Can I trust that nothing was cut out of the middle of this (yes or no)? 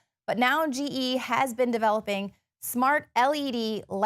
no